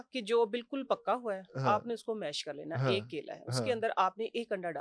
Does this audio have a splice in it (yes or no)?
no